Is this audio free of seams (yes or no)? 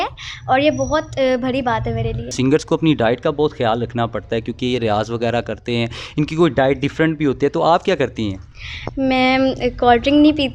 no